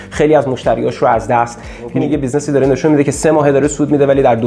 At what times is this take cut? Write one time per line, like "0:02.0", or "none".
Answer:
0:01.9